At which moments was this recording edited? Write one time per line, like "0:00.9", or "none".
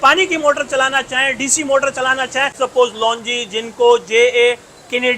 0:02.6